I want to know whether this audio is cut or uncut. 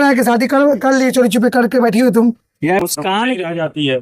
cut